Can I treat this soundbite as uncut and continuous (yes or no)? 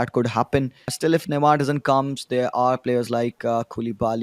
no